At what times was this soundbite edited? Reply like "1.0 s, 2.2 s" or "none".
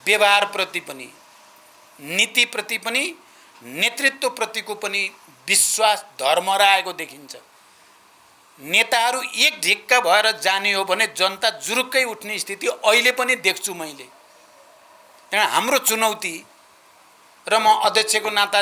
none